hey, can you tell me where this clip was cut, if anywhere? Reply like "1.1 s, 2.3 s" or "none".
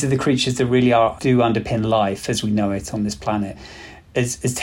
1.2 s, 3.6 s